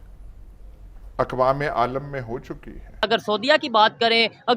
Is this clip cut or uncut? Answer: cut